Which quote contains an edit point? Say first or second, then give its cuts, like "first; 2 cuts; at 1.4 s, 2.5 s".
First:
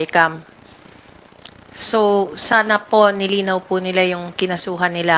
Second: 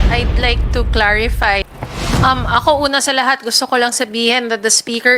second; 1 cut; at 1.7 s